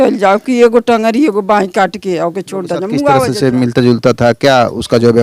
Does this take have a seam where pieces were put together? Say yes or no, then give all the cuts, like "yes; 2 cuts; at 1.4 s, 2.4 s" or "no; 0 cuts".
yes; 1 cut; at 3.3 s